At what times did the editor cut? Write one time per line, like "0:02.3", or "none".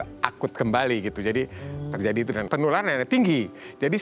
0:02.4